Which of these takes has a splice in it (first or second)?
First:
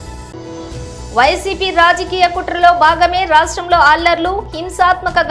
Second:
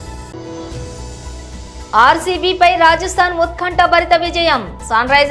second